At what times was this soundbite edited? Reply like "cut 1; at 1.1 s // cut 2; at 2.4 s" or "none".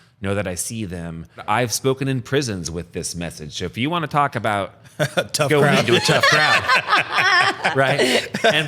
cut 1; at 1.4 s